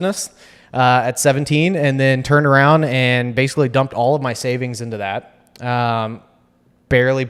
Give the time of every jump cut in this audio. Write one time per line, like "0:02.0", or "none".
none